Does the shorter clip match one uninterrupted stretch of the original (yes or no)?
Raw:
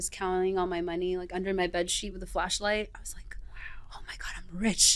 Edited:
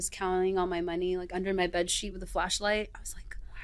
yes